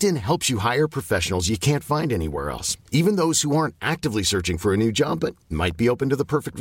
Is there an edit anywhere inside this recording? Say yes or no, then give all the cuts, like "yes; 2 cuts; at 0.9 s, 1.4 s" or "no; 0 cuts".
no; 0 cuts